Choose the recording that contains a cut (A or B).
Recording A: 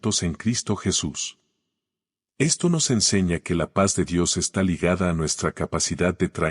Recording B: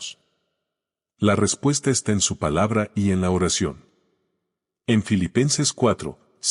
A